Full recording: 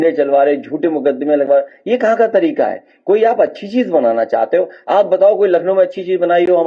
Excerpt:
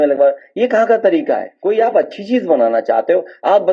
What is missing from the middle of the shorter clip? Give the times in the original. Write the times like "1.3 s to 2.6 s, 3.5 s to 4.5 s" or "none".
2.8 s to 2.9 s